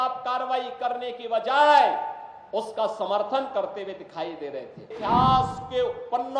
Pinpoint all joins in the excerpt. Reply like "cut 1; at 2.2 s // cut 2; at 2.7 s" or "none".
cut 1; at 4.9 s

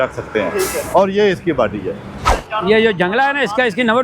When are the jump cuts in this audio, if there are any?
cut 1; at 2.2 s

